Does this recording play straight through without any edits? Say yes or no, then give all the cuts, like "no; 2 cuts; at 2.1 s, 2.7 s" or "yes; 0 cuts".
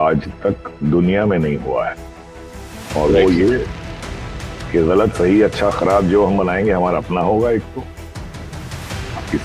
yes; 0 cuts